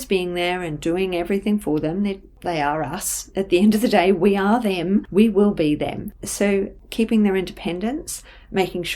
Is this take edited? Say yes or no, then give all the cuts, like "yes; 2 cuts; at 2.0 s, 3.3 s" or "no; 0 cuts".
yes; 1 cut; at 5.1 s